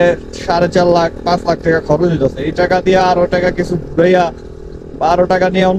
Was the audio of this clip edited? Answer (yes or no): no